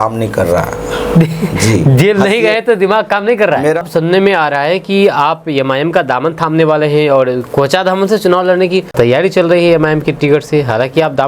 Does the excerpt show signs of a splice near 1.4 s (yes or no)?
no